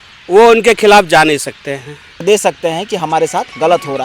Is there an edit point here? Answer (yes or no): yes